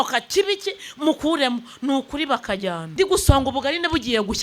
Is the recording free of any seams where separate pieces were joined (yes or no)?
no